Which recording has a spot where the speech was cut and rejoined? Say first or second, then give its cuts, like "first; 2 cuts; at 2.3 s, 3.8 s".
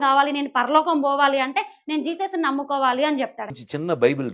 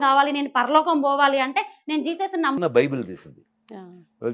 second; 1 cut; at 2.6 s